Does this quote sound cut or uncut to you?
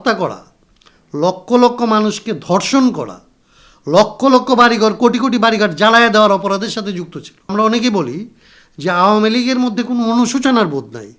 cut